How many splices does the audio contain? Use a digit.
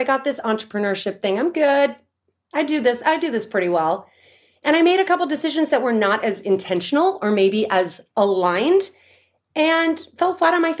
0